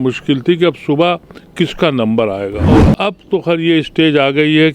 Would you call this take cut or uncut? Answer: cut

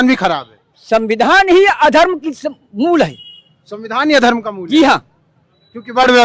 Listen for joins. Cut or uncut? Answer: uncut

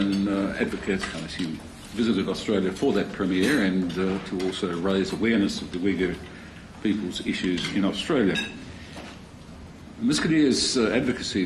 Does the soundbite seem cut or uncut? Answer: uncut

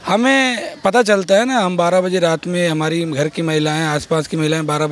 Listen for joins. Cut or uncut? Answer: uncut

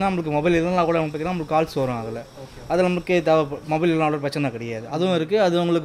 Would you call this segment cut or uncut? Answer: uncut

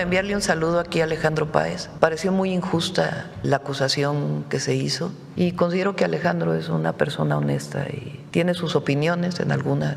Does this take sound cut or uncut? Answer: cut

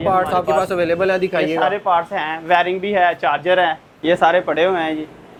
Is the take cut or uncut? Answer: uncut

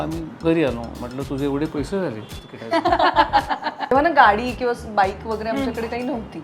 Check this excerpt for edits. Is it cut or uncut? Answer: cut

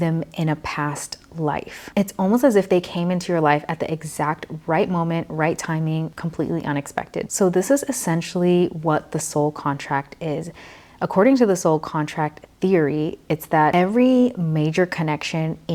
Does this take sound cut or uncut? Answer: uncut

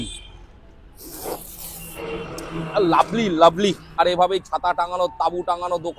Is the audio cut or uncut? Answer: cut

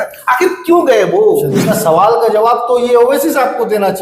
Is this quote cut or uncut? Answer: cut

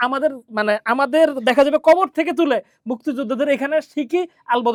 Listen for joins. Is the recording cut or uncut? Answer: uncut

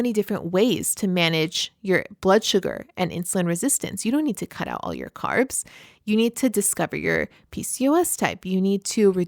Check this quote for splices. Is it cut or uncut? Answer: uncut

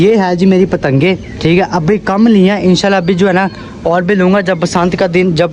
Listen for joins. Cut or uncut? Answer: uncut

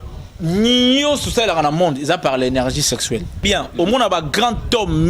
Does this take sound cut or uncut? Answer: cut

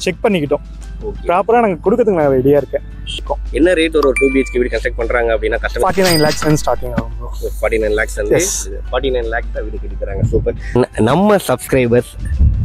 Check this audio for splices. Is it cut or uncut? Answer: cut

